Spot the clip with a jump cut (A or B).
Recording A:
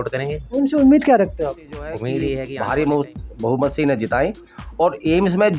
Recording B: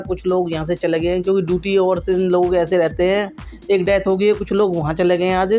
A